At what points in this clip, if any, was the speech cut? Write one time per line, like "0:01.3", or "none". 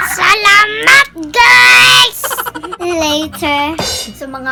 none